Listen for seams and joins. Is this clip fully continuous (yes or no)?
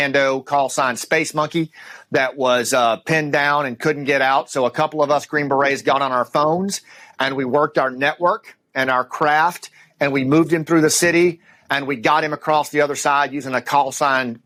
yes